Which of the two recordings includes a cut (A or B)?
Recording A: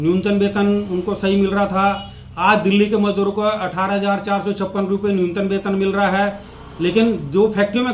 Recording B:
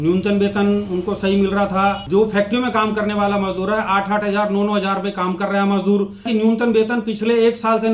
B